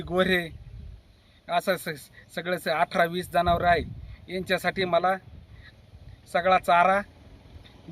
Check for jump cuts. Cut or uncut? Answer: uncut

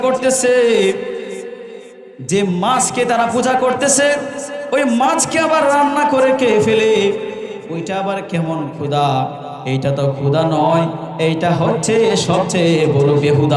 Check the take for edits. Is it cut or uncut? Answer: uncut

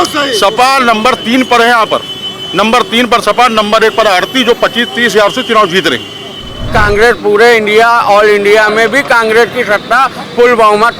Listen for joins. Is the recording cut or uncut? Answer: cut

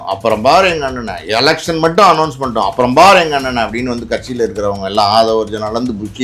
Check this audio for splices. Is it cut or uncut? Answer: uncut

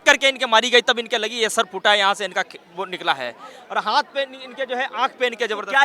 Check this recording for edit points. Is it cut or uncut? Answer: uncut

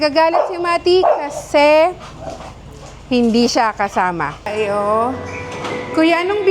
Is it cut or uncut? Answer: cut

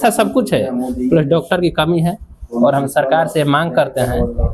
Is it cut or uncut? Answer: uncut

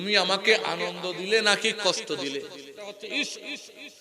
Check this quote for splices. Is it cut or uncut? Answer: cut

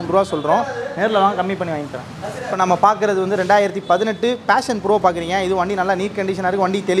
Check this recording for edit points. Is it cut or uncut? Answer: uncut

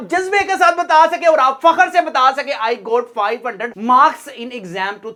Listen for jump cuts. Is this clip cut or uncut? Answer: uncut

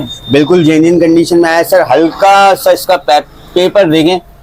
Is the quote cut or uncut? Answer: uncut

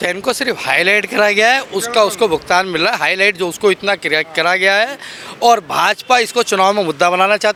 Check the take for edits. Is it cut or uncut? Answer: uncut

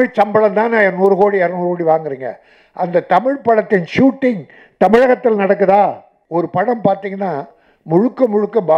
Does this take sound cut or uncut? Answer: cut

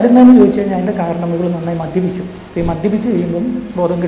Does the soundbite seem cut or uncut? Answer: uncut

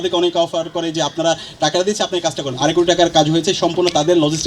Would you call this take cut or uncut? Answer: cut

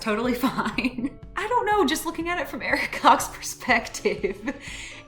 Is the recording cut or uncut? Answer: cut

